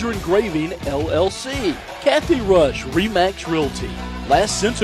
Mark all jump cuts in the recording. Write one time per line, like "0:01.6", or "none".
0:01.9

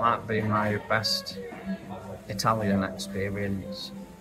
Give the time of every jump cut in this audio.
none

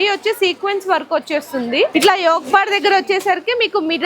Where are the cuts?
0:01.9

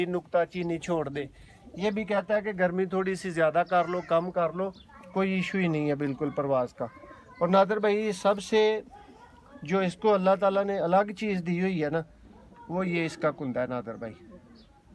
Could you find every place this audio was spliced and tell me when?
none

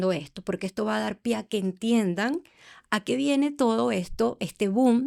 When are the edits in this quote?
none

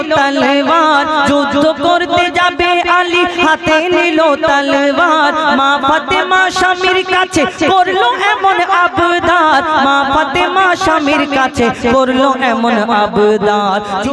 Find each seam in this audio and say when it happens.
none

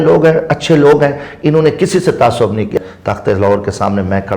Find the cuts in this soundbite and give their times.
0:02.8

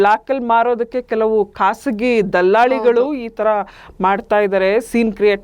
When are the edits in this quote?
none

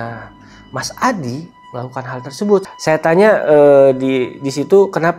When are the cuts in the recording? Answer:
0:02.7

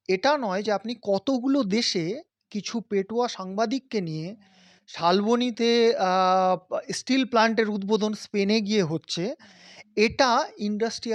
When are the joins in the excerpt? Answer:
none

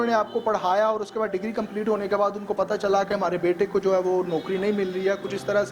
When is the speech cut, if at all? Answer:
none

